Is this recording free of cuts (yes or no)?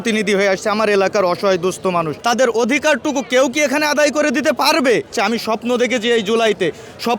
no